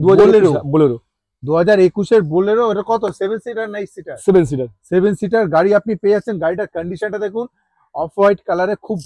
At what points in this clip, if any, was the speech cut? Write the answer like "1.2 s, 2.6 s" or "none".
none